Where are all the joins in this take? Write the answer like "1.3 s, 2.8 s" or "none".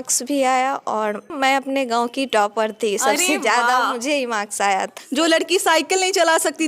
1.3 s, 5.0 s